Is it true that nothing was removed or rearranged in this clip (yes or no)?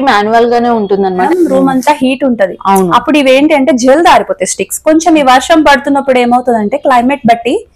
no